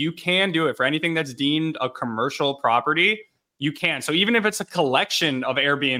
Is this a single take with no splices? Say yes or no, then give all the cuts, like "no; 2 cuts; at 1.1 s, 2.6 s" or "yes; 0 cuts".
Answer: yes; 0 cuts